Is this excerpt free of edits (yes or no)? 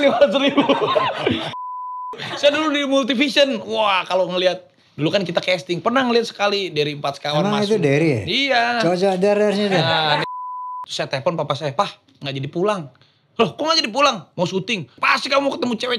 no